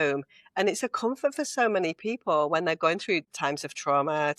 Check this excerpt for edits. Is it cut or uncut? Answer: cut